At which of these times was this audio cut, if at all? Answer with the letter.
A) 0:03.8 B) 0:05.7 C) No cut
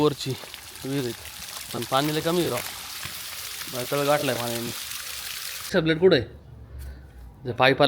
B